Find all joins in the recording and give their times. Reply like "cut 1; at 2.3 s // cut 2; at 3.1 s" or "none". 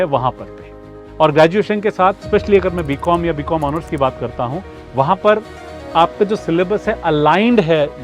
cut 1; at 1.0 s

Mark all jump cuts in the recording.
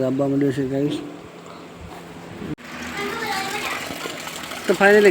cut 1; at 2.5 s

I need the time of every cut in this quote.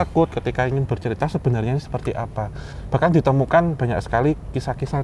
cut 1; at 2.7 s

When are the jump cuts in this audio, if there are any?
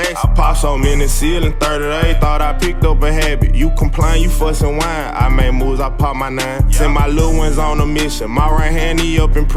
none

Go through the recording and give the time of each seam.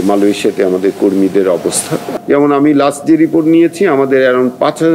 cut 1; at 2.1 s

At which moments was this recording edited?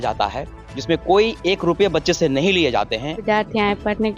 cut 1; at 3.2 s

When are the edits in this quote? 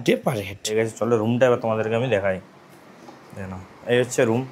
cut 1; at 1.0 s

